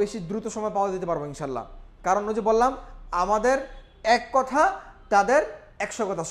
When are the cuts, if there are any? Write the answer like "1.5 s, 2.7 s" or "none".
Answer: none